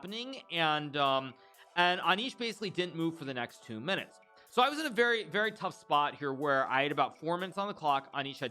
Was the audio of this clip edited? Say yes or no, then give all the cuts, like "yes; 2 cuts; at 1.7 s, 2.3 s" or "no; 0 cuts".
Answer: no; 0 cuts